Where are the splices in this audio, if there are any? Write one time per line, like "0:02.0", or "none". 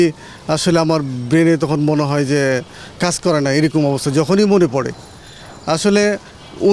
none